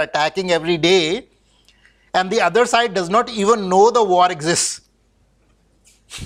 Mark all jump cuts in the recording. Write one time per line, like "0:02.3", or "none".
none